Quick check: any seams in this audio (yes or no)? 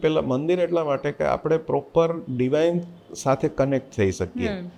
no